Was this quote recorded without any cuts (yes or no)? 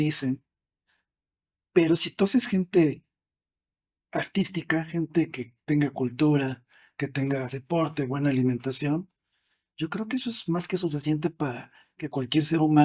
yes